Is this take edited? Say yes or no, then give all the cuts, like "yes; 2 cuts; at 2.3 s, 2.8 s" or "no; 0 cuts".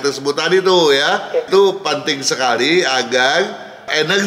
yes; 1 cut; at 1.5 s